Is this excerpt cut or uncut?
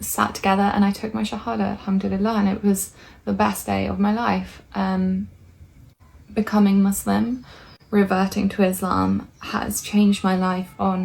uncut